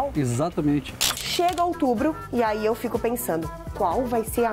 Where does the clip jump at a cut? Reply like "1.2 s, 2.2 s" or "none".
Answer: 1.1 s